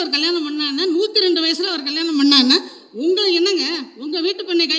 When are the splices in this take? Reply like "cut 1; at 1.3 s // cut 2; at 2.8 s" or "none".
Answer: none